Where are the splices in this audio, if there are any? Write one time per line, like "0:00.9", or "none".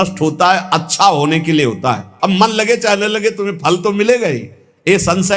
0:02.1